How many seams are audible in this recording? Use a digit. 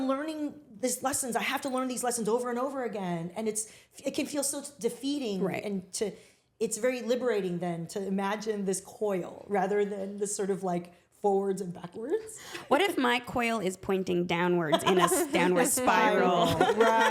0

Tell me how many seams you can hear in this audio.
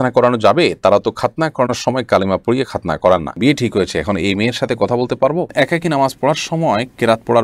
2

